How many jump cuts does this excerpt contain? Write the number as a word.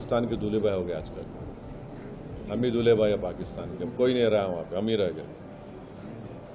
zero